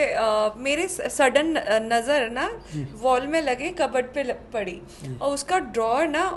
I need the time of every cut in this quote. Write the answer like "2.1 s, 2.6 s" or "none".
none